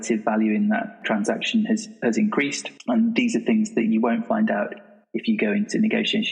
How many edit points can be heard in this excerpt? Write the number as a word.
two